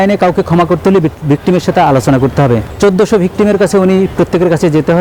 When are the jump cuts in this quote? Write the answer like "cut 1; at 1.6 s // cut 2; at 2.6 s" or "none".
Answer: cut 1; at 2.7 s